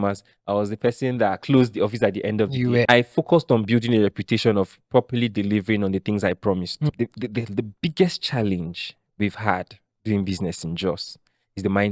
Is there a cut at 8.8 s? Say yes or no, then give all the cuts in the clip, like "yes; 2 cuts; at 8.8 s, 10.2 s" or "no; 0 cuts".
no; 2 cuts; at 2.9 s, 6.9 s